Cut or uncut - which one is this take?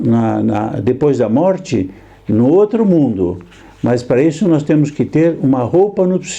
uncut